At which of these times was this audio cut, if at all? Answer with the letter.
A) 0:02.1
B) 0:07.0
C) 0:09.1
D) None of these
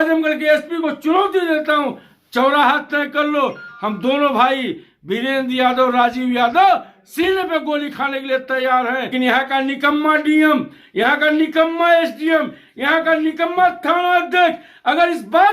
C